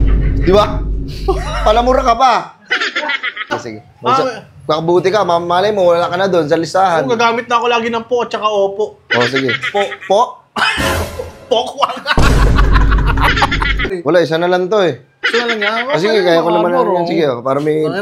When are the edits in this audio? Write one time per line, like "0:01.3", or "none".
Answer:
0:03.5
0:13.9